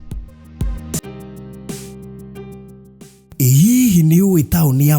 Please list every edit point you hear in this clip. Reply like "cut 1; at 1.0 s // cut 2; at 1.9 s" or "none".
cut 1; at 1.0 s